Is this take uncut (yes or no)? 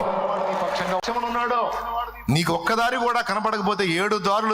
no